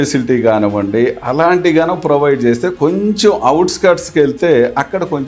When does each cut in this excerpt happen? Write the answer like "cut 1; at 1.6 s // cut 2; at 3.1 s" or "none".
none